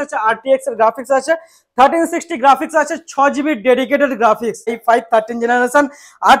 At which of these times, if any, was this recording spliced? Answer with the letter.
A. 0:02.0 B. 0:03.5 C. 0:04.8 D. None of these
C